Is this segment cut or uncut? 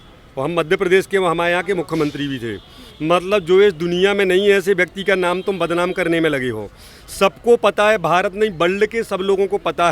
uncut